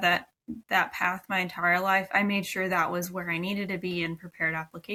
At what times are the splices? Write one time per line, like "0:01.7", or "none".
none